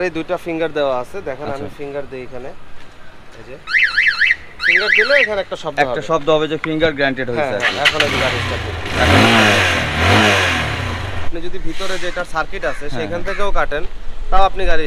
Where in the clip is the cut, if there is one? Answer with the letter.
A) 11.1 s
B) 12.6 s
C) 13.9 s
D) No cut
A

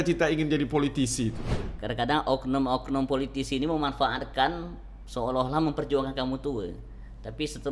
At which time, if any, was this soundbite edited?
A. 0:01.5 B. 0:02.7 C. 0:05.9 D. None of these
A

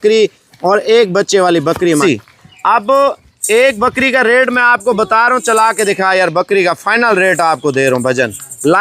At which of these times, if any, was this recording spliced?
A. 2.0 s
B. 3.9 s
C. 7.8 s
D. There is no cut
A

